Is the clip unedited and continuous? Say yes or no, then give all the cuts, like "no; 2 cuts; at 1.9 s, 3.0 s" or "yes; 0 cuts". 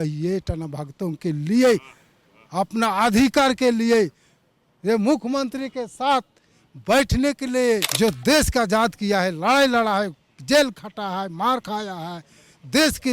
no; 1 cut; at 7.9 s